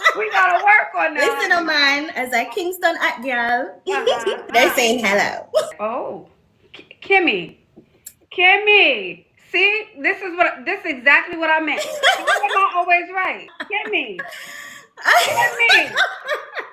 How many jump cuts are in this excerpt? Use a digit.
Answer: 3